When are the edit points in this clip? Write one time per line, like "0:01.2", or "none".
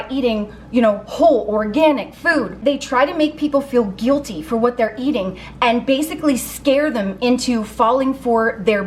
0:02.6

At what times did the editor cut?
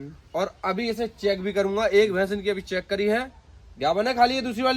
none

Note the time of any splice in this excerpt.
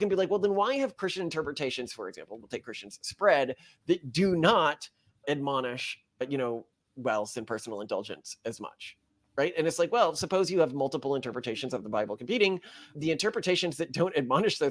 none

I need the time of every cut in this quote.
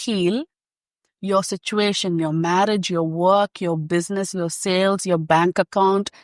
none

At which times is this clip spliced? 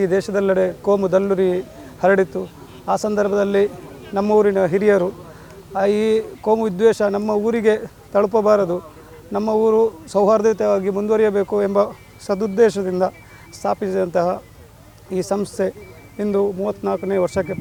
none

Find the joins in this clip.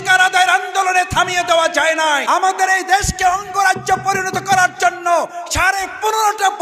0:02.2

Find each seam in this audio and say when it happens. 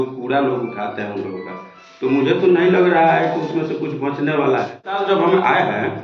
0:05.0

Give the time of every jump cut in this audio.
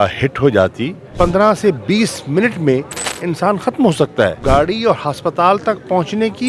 0:01.1
0:04.4

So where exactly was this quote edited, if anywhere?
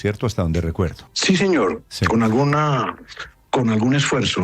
0:01.1

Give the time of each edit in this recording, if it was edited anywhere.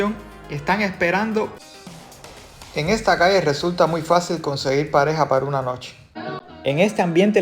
0:01.5
0:06.2

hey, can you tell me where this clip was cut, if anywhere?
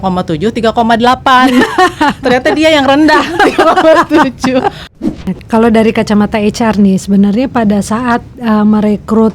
0:04.8

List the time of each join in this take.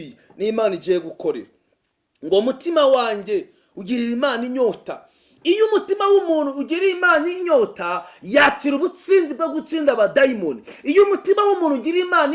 none

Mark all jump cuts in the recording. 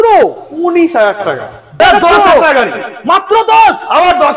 0:01.8

